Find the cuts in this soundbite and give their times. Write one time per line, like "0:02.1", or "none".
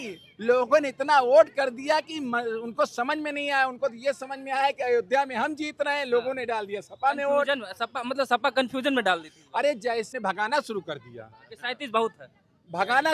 0:10.1